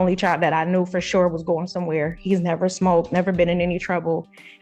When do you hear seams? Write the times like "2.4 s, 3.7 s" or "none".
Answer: none